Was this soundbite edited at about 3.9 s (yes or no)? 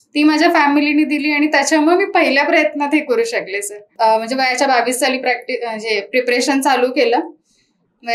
yes